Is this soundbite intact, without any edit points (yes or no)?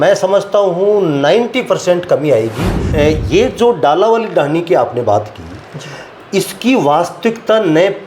no